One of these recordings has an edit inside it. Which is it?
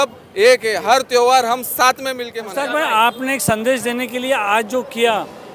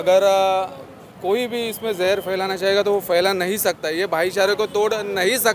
first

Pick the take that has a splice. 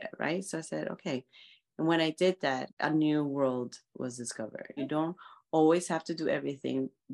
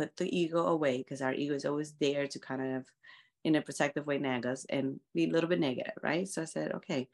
first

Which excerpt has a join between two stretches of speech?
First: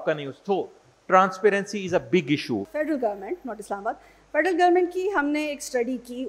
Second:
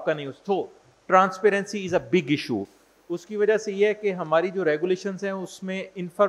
first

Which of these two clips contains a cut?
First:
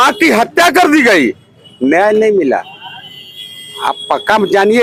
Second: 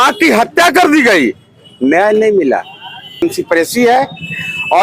second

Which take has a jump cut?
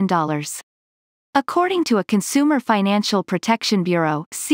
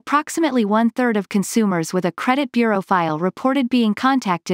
first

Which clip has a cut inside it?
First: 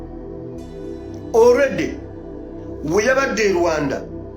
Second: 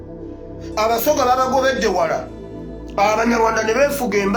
first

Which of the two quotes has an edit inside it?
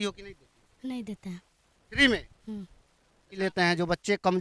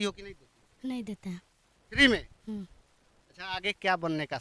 first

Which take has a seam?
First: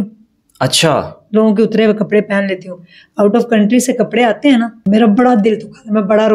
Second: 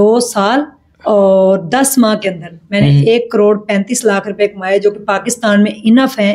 first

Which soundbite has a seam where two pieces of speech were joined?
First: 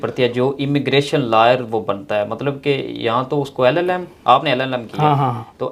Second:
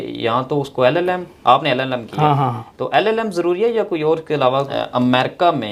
second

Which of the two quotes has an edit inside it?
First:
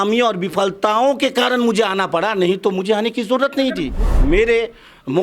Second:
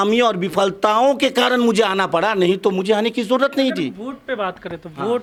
first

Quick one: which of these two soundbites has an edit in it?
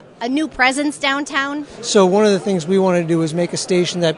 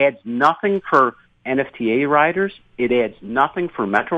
first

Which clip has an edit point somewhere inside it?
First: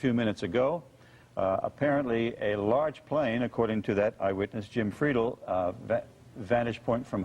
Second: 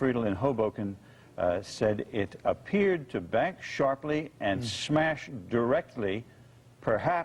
first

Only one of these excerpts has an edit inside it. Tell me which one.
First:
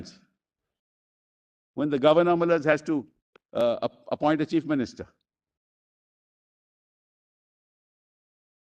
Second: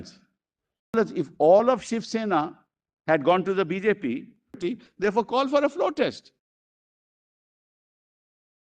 second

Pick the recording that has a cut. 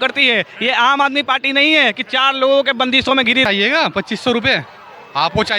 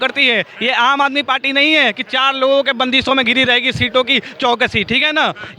first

